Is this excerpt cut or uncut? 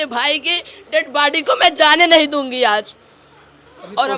uncut